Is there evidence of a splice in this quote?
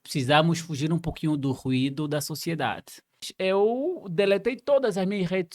yes; 1 cut; at 3.3 s

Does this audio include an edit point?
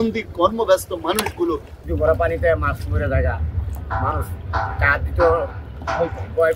yes; 1 cut; at 1.7 s

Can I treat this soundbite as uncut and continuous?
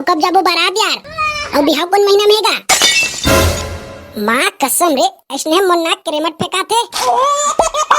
no; 1 cut; at 6.9 s

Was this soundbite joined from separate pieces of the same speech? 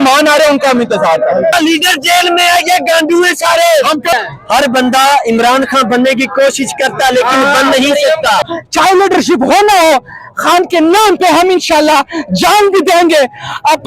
yes; 3 cuts; at 1.6 s, 4.1 s, 8.4 s

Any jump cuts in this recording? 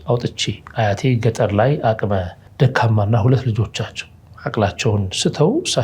yes; 1 cut; at 2.4 s

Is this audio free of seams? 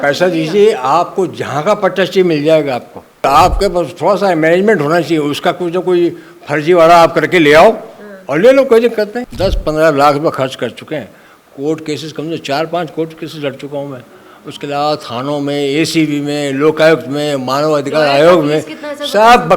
no; 2 cuts; at 3.2 s, 9.2 s

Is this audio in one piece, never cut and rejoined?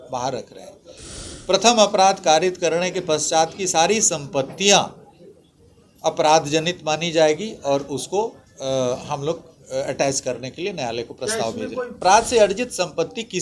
no; 1 cut; at 11.9 s

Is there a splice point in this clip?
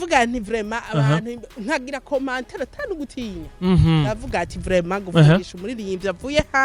no; 0 cuts

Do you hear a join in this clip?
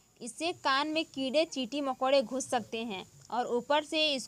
no; 0 cuts

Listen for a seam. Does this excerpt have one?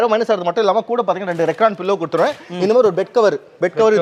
no; 0 cuts

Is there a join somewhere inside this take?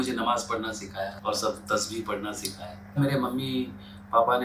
yes; 2 cuts; at 1.2 s, 3.0 s

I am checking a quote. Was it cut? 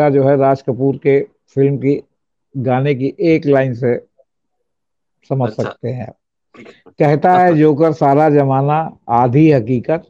no; 0 cuts

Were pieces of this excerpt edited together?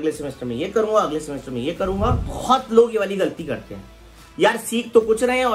yes; 1 cut; at 2.3 s

